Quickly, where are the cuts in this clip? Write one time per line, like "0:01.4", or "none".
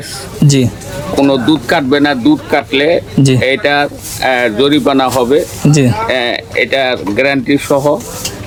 none